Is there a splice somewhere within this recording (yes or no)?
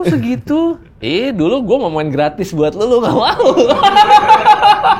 no